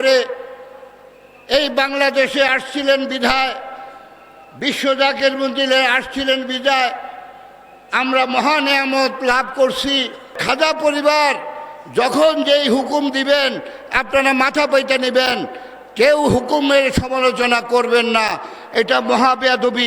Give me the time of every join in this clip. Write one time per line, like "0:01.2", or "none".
0:10.4